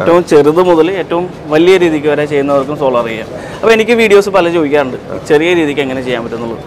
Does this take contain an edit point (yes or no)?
no